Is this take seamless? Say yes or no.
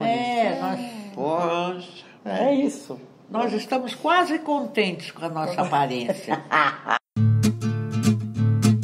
no